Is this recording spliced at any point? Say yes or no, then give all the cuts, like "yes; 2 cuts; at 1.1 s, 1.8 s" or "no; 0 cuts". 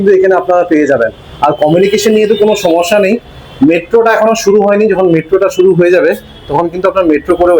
no; 0 cuts